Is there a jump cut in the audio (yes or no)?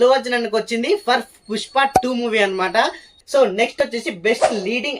no